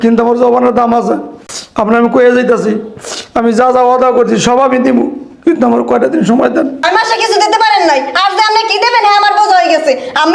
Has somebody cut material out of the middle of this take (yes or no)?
no